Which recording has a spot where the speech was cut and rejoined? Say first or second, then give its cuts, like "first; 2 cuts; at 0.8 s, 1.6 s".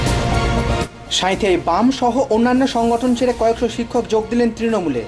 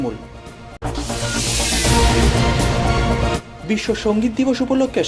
first; 1 cut; at 1.0 s